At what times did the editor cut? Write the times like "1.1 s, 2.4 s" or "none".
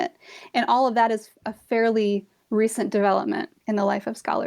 3.5 s